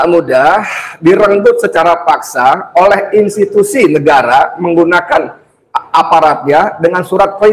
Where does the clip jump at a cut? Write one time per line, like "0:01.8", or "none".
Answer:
none